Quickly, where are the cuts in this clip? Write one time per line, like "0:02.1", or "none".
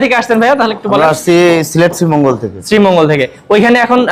none